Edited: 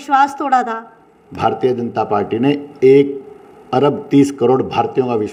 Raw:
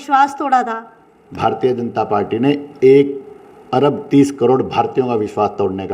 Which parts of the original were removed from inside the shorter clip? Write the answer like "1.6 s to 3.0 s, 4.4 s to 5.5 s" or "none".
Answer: none